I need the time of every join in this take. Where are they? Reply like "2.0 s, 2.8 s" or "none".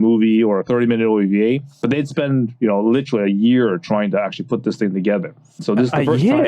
none

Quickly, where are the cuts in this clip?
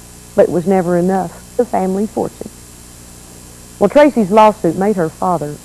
none

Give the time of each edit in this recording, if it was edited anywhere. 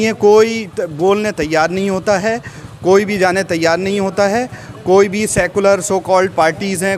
none

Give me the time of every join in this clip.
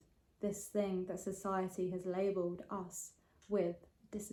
none

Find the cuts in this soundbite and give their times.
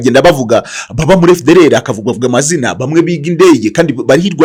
none

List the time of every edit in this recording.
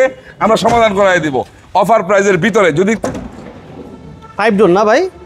none

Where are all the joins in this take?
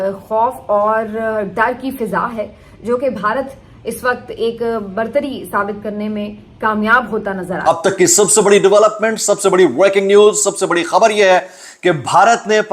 7.7 s

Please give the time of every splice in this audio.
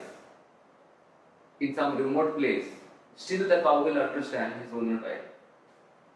none

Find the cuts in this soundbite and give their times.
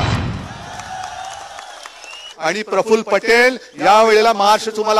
2.3 s

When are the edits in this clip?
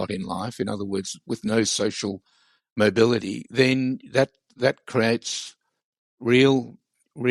none

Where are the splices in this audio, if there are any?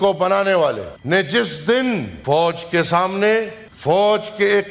0.9 s, 2.1 s, 3.6 s

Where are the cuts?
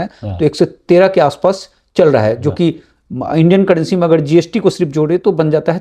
none

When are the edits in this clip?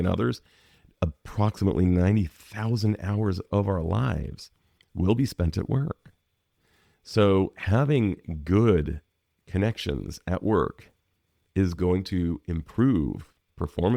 none

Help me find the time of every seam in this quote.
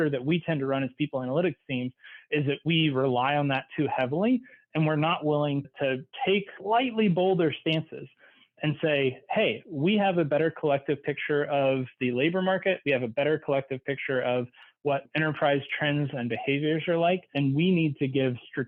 none

